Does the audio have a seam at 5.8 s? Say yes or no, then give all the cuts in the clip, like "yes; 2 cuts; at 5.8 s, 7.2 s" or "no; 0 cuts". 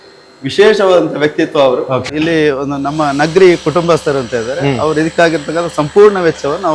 no; 1 cut; at 2.1 s